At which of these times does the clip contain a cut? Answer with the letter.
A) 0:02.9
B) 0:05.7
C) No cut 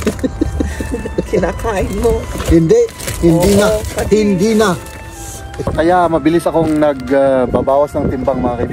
B